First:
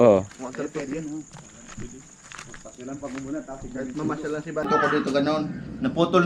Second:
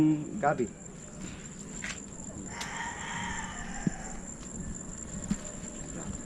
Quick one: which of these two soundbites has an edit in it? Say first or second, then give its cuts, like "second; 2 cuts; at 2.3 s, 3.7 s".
first; 1 cut; at 4.7 s